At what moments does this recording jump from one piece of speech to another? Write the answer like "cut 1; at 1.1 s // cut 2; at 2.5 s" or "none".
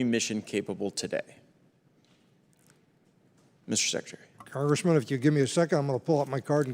none